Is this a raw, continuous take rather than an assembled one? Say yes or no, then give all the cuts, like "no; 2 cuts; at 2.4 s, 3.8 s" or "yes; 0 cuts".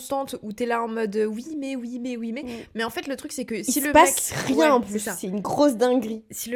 yes; 0 cuts